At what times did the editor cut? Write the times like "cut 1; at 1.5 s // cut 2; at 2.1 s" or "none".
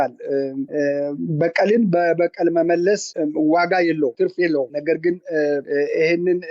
cut 1; at 3.1 s